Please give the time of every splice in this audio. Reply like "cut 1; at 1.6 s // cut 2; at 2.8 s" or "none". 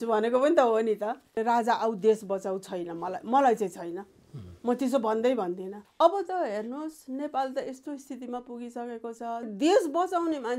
cut 1; at 1.4 s // cut 2; at 5.8 s // cut 3; at 9.5 s